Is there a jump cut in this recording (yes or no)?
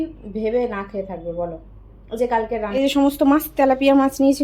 yes